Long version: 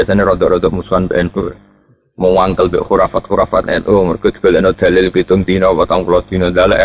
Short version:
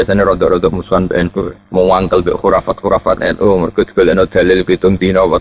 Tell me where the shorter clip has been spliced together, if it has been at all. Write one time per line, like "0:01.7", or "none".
0:01.6